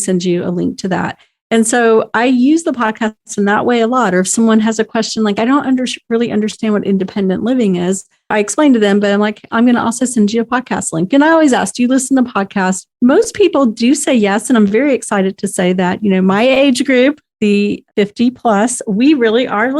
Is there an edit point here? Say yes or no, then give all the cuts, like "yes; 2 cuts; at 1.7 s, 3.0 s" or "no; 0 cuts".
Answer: no; 0 cuts